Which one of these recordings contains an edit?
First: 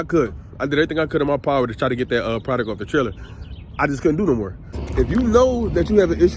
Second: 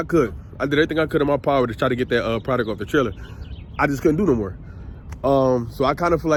first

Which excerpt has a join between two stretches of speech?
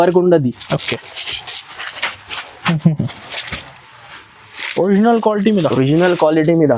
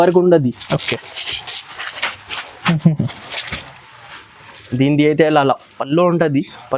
second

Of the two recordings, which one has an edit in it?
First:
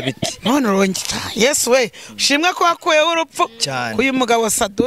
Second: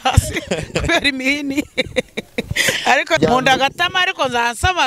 second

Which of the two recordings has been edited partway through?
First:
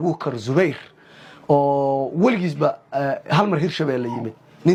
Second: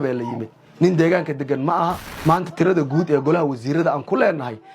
second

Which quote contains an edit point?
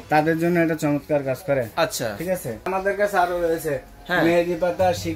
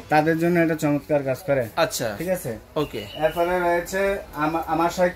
first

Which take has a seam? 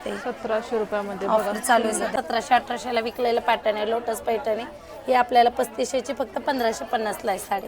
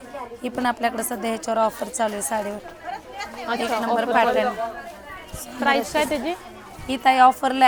first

